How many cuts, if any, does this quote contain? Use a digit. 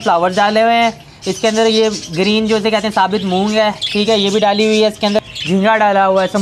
1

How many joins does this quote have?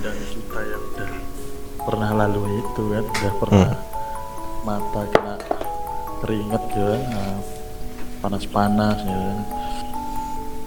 0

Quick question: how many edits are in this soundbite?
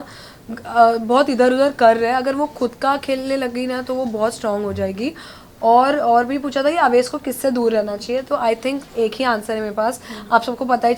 0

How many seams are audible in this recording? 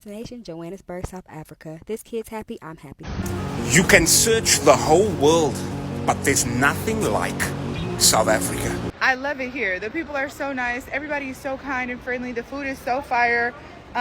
2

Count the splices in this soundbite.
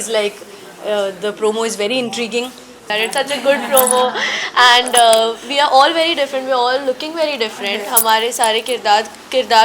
1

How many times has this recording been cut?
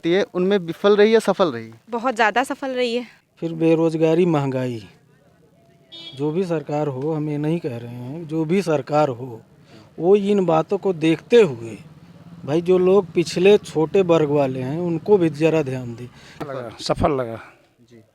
2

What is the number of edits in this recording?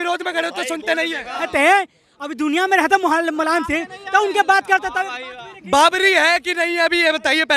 1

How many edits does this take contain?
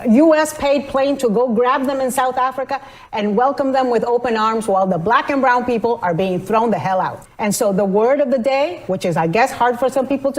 1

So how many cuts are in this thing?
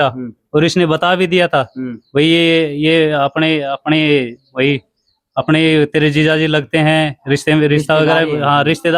0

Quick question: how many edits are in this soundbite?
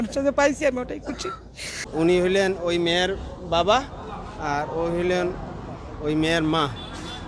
1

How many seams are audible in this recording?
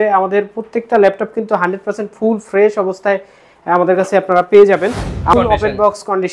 1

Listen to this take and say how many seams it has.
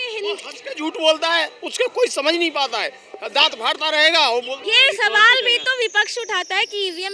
1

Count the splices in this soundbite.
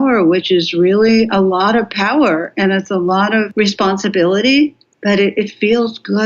2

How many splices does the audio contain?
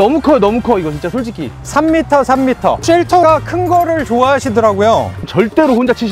2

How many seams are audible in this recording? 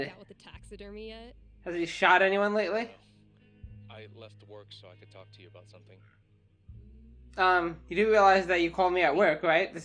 0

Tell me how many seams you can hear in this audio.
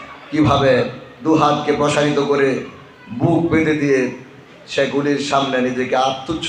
1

